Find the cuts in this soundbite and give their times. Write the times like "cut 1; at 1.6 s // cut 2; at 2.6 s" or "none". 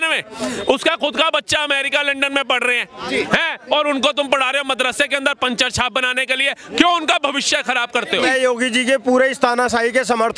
cut 1; at 8.1 s